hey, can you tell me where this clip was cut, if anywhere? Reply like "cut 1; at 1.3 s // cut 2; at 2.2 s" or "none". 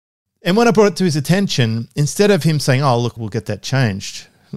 cut 1; at 3.2 s